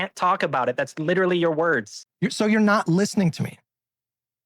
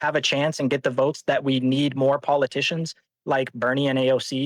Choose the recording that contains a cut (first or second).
first